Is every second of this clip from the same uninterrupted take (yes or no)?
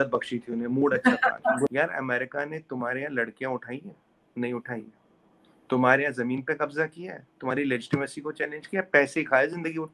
no